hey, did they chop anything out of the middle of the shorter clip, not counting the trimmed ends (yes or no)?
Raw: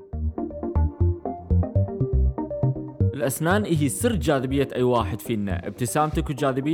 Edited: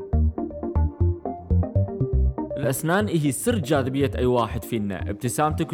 yes